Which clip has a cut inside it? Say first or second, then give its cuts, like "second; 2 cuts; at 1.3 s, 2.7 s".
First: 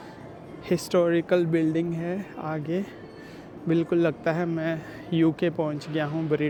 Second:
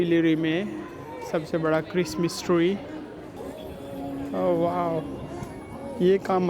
second; 1 cut; at 3.3 s